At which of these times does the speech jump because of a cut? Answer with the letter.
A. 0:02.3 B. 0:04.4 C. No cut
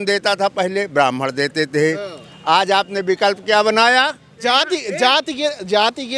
B